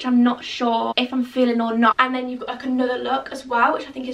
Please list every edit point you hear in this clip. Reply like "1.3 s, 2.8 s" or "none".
0.9 s, 1.9 s